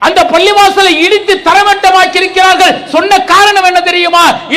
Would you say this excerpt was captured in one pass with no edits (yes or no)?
yes